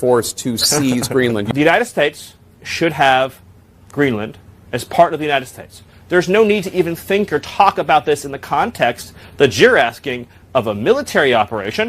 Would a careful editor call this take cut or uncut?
cut